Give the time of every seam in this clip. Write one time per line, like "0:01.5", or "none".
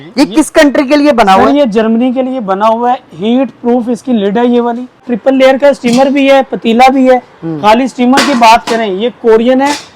0:05.1